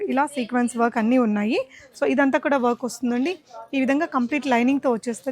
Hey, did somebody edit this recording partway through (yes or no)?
no